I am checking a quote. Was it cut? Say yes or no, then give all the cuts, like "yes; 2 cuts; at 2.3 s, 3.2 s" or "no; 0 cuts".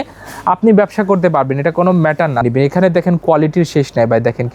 yes; 1 cut; at 2.4 s